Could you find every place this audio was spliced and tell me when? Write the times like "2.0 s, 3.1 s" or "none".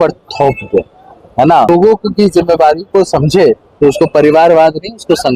1.7 s